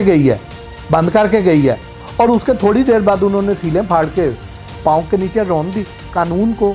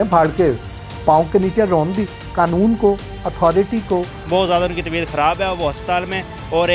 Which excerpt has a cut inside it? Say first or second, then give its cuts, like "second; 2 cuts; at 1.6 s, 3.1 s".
second; 1 cut; at 4.2 s